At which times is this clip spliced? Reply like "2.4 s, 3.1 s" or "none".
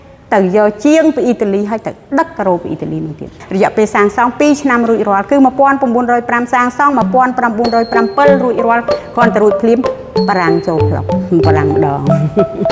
3.3 s